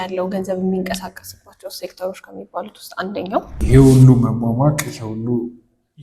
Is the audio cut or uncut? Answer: cut